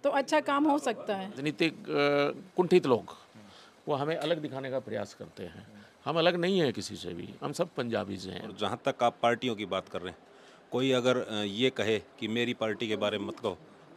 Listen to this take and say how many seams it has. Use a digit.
2